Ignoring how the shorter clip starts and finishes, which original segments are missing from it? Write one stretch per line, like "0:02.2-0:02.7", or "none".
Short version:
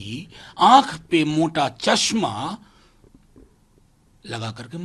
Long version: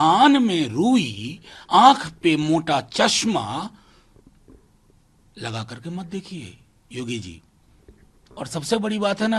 none